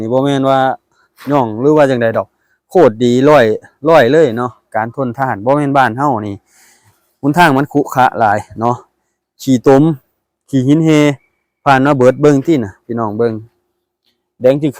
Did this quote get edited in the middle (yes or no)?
no